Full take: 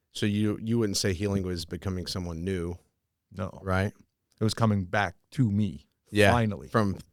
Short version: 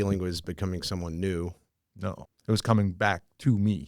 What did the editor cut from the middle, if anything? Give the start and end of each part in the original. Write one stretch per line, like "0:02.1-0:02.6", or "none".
0:03.3-0:04.0